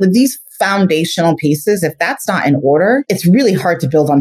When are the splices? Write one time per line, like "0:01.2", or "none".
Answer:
0:03.0